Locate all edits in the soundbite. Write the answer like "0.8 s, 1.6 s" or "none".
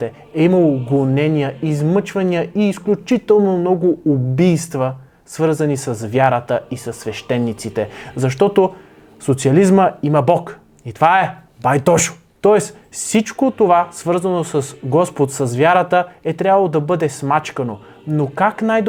none